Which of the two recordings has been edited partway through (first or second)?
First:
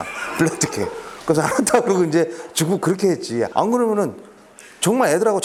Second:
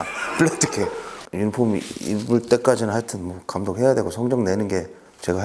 second